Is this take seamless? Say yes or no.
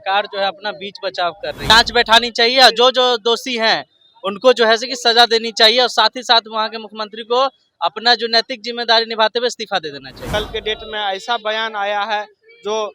no